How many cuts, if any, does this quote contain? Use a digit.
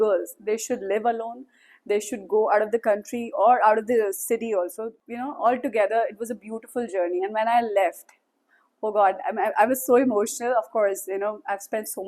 1